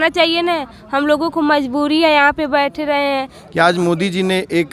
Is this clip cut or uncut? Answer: cut